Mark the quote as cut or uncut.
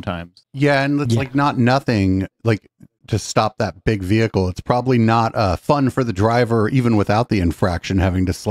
uncut